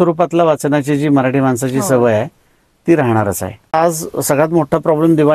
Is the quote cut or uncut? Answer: cut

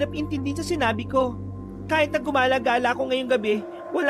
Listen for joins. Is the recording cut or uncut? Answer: uncut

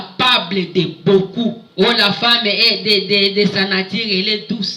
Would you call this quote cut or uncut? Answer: cut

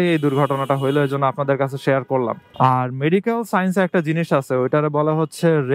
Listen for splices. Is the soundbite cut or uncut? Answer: cut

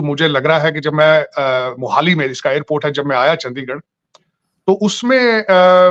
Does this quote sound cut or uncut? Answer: uncut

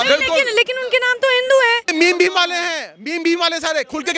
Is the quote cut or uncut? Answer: cut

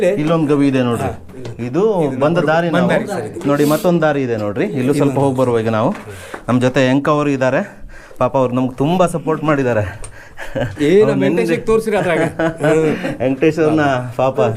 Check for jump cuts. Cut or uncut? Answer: uncut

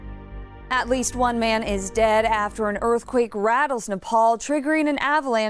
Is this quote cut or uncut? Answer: uncut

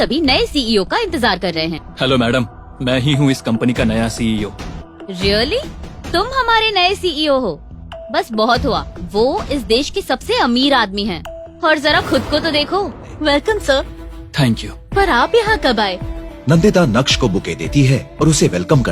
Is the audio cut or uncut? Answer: cut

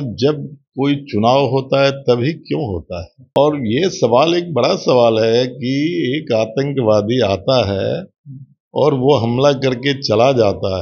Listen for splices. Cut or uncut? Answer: cut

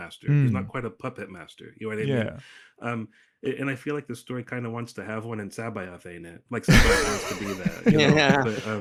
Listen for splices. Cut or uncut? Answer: uncut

